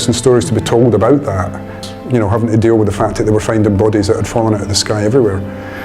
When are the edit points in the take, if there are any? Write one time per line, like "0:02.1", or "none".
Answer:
0:01.7